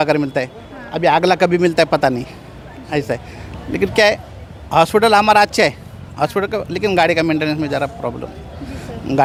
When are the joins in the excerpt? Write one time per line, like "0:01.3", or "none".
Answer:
none